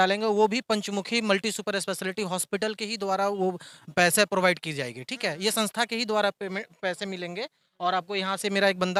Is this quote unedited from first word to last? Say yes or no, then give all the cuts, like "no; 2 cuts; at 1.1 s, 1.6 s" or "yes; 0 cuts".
yes; 0 cuts